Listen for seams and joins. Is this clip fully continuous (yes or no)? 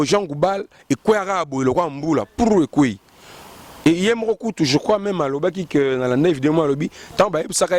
yes